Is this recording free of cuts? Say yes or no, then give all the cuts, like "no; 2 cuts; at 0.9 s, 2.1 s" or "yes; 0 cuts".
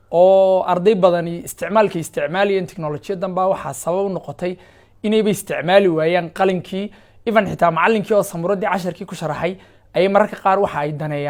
yes; 0 cuts